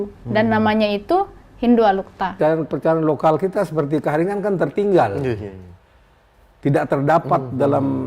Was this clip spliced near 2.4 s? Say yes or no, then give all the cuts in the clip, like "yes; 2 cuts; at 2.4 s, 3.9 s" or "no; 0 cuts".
yes; 1 cut; at 2.4 s